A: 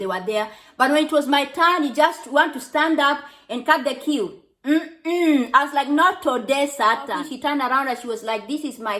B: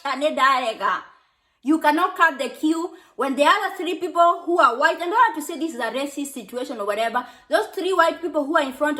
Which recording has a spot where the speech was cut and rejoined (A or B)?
A